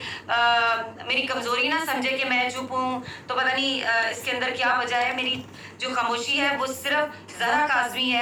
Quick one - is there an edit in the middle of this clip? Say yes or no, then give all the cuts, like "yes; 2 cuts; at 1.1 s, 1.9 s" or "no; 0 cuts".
no; 0 cuts